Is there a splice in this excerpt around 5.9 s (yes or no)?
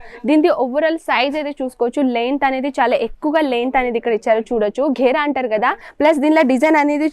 yes